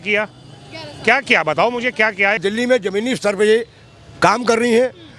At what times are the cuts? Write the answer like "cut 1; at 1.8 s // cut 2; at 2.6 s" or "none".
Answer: cut 1; at 2.4 s